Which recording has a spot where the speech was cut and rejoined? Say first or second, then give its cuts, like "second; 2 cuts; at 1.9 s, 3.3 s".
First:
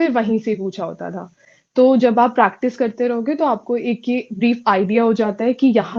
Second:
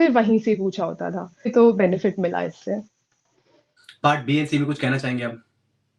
second; 1 cut; at 1.5 s